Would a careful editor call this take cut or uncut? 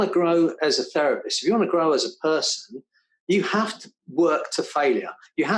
uncut